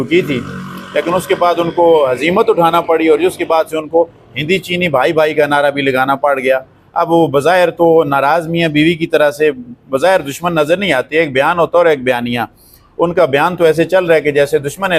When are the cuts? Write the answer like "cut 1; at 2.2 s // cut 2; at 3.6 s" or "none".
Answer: none